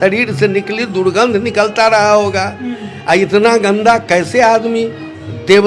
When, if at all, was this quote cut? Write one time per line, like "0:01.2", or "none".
none